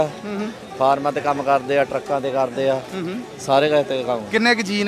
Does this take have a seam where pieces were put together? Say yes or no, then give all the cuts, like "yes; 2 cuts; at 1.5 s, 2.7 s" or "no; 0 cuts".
no; 0 cuts